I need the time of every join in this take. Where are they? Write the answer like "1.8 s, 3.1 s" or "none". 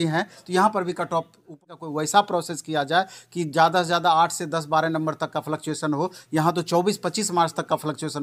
1.5 s